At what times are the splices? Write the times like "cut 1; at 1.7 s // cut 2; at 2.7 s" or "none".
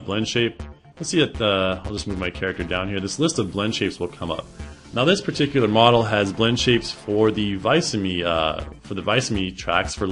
cut 1; at 6.1 s